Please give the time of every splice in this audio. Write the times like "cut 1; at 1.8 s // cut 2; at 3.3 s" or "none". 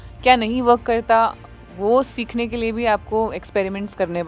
none